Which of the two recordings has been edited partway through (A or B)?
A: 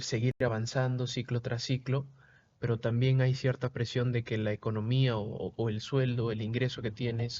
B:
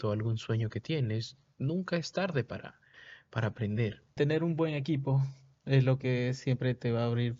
B